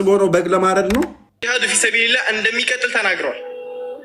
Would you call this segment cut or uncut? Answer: cut